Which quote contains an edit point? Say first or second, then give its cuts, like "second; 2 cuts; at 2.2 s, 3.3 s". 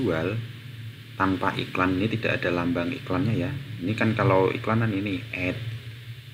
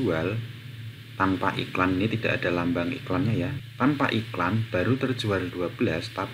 second; 1 cut; at 3.6 s